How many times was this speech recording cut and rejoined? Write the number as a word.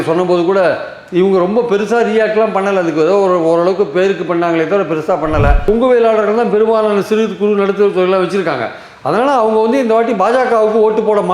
one